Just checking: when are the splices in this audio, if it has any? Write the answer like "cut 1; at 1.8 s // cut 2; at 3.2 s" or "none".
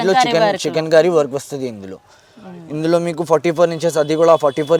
none